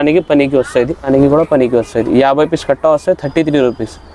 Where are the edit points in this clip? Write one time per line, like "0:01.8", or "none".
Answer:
0:01.1